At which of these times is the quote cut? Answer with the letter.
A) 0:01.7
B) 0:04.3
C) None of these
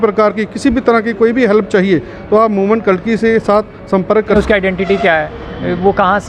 B